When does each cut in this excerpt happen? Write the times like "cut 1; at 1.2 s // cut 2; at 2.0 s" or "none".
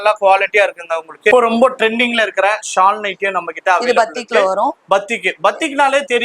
cut 1; at 1.3 s